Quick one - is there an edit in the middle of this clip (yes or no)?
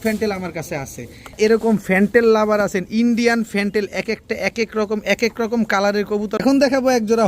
yes